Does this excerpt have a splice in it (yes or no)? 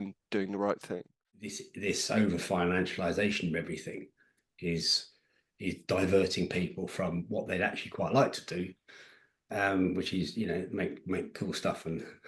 yes